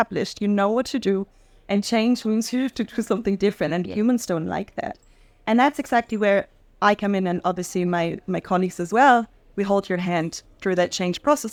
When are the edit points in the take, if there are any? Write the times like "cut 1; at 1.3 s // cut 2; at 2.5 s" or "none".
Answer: none